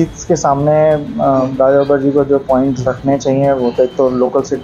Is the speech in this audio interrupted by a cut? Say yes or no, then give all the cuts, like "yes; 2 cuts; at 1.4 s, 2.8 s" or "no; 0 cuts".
no; 0 cuts